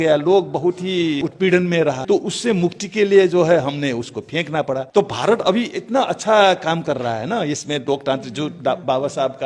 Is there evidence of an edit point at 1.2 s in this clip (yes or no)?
yes